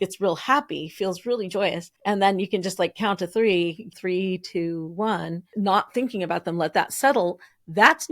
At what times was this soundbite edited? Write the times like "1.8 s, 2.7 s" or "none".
1.9 s, 4.0 s, 5.4 s